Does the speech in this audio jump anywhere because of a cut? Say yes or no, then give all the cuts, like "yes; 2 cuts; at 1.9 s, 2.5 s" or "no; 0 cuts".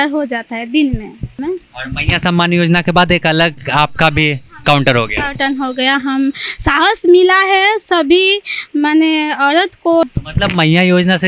yes; 2 cuts; at 1.3 s, 10.0 s